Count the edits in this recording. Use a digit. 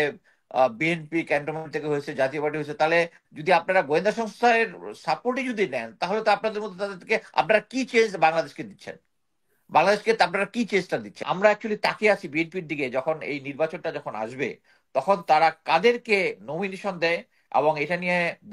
1